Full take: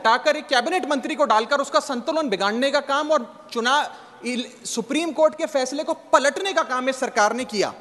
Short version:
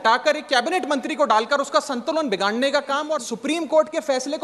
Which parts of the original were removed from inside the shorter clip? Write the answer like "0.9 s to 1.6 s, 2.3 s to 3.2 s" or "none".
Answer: 3.3 s to 4.8 s